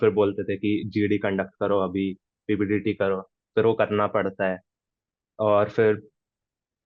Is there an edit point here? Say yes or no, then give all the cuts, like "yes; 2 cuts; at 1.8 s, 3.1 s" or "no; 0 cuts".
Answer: no; 0 cuts